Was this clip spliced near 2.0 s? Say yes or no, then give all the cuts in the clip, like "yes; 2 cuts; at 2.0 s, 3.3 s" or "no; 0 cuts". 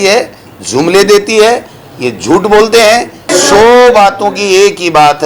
no; 1 cut; at 3.3 s